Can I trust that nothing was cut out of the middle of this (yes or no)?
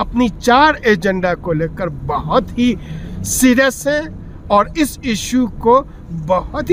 yes